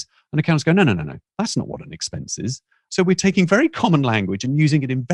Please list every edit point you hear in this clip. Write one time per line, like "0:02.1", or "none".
0:02.8

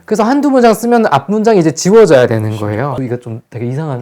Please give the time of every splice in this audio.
0:03.1

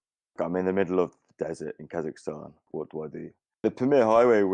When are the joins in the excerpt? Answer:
0:03.6

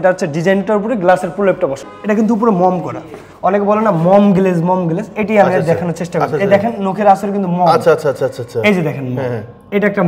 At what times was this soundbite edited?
0:01.9

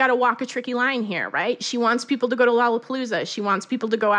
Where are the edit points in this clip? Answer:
none

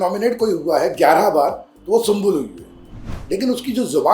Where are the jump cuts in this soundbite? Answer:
0:03.1

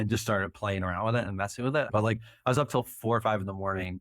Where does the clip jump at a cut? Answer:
0:01.9

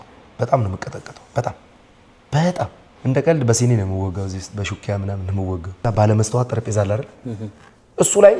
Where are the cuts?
0:02.9
0:05.8

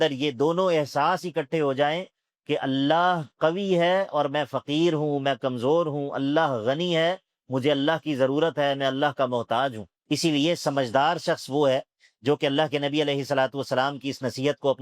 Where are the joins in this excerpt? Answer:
0:09.9

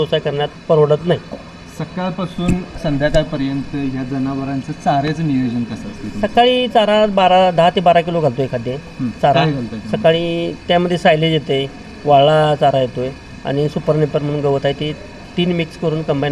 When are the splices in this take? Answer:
none

